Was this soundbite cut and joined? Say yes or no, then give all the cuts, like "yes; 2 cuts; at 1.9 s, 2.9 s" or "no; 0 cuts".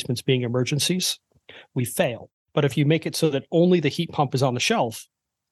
yes; 1 cut; at 2.3 s